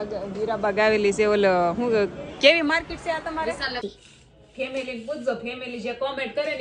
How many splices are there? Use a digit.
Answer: 1